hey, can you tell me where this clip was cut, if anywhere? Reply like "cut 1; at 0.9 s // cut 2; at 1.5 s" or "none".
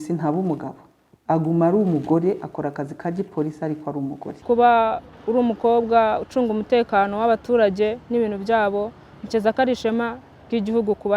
cut 1; at 4.3 s // cut 2; at 5.1 s